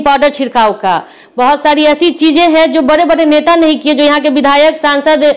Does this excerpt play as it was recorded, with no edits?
yes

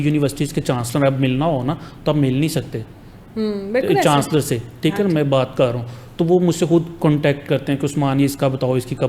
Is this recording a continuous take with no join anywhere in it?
yes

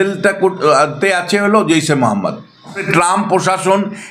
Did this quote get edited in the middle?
yes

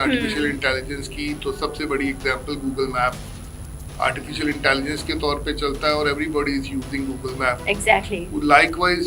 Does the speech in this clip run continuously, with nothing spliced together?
yes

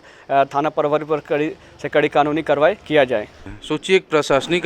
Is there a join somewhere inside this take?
yes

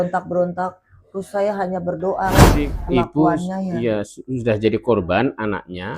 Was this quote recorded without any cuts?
no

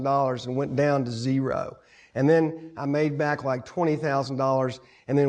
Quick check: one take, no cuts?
yes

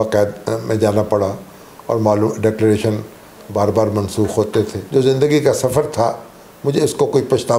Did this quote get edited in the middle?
yes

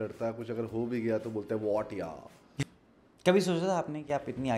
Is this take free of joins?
no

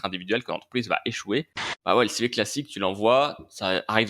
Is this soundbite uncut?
no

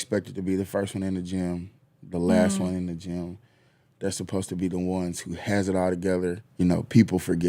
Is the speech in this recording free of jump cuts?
no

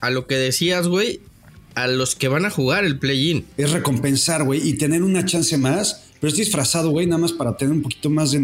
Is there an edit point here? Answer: yes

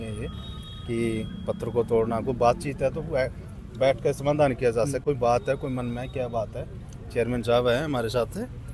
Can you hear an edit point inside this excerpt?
no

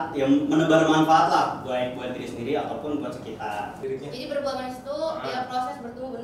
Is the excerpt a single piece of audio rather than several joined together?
no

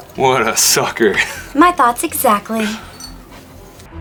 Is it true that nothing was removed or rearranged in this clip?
yes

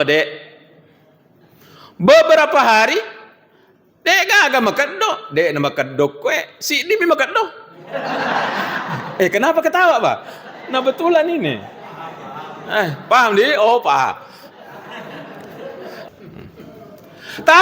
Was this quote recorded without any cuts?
no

